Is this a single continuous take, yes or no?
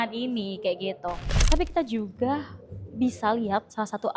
no